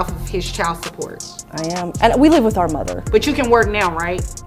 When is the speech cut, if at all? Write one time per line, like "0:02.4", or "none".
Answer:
0:03.0